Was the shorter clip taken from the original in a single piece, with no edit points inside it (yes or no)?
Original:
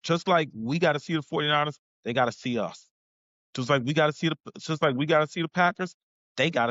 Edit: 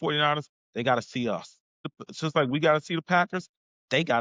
no